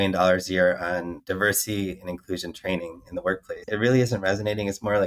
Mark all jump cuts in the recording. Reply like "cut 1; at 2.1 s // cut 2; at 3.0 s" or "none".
cut 1; at 1.2 s // cut 2; at 3.7 s